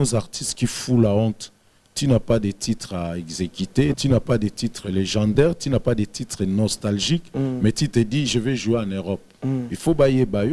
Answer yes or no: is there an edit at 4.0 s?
yes